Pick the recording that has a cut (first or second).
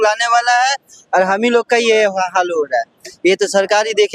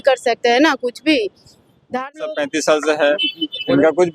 second